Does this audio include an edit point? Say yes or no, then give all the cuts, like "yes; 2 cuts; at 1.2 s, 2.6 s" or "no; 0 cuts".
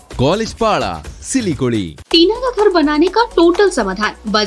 yes; 1 cut; at 2.0 s